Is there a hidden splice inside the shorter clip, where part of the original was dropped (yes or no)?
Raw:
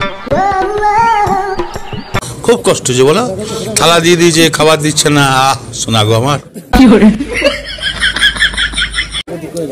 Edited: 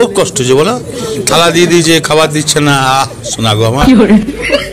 yes